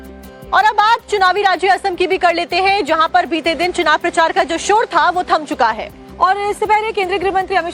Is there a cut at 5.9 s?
no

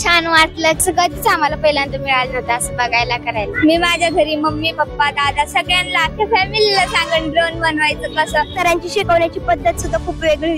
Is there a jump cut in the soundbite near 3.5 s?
yes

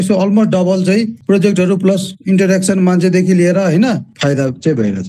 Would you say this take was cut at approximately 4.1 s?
yes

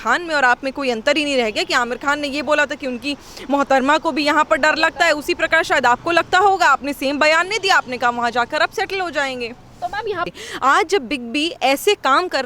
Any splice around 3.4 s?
no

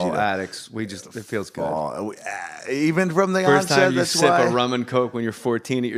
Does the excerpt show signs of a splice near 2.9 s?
yes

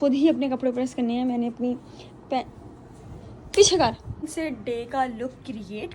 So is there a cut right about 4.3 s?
yes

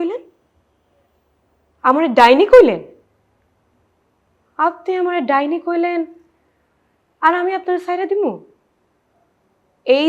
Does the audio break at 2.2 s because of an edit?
no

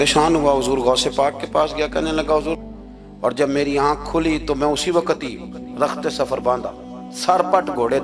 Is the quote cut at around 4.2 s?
no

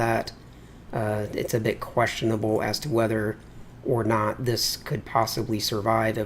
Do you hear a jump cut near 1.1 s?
no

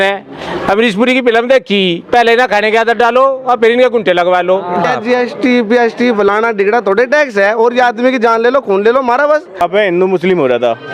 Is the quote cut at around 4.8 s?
yes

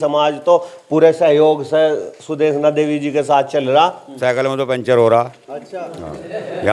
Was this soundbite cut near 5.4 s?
no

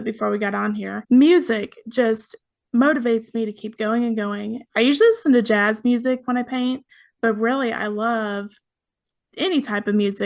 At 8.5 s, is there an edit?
no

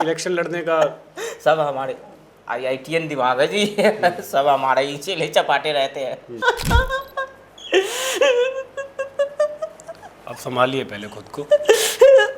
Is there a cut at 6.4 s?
yes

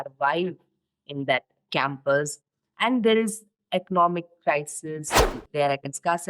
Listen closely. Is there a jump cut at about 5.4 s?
yes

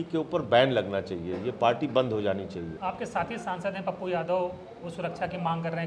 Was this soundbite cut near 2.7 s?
yes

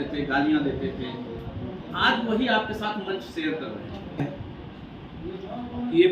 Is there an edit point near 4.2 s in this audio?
yes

